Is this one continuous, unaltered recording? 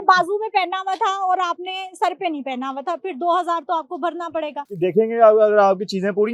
no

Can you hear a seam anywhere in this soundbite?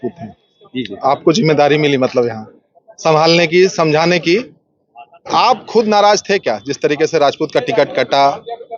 no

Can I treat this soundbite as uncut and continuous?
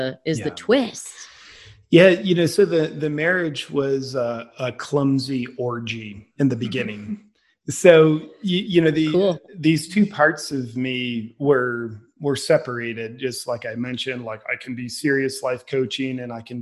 yes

